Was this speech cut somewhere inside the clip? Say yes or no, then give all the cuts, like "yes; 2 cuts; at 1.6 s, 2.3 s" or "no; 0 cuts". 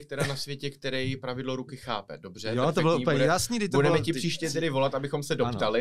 no; 0 cuts